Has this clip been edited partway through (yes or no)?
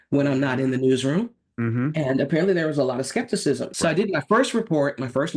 yes